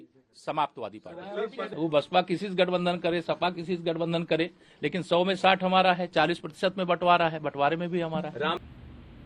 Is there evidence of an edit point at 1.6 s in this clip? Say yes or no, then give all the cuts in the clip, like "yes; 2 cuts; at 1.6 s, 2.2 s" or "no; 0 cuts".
no; 0 cuts